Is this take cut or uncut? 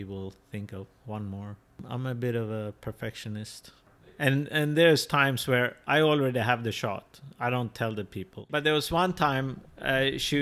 cut